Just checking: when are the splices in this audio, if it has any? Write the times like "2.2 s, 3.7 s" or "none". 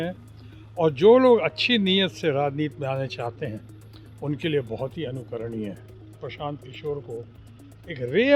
6.2 s